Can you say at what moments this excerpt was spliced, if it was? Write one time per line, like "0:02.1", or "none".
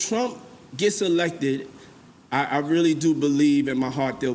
none